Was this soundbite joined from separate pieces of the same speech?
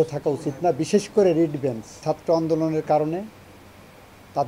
yes; 1 cut; at 2.0 s

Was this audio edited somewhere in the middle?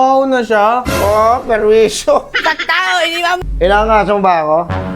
yes; 1 cut; at 3.4 s

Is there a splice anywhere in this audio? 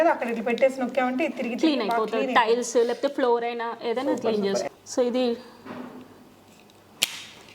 yes; 1 cut; at 4.6 s

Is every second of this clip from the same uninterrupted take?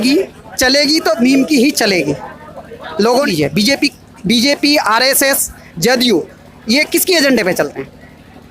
no; 1 cut; at 3.3 s

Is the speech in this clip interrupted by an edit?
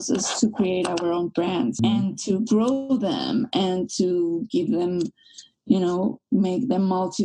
yes; 1 cut; at 1.8 s

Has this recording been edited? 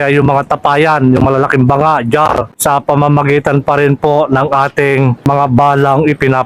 yes; 2 cuts; at 2.5 s, 5.2 s

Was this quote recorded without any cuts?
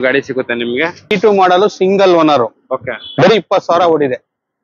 no; 1 cut; at 1.1 s

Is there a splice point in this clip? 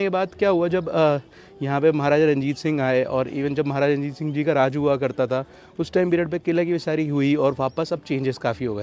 no; 0 cuts

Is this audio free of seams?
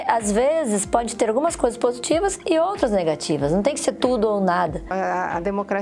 no; 1 cut; at 4.9 s

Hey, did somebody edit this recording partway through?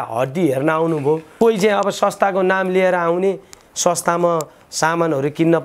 yes; 1 cut; at 1.3 s

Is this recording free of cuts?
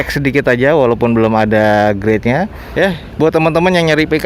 no; 1 cut; at 2.6 s

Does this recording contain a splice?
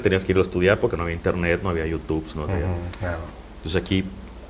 no; 0 cuts

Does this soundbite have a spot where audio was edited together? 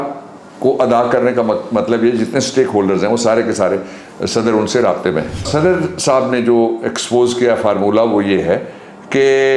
yes; 1 cut; at 5.5 s

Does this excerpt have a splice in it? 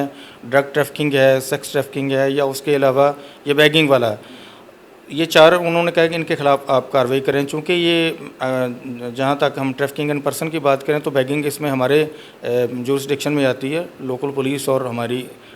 no; 0 cuts

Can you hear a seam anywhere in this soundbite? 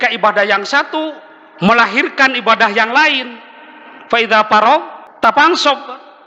yes; 1 cut; at 5.0 s

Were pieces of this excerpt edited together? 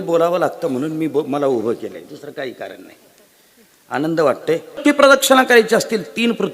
yes; 1 cut; at 4.8 s

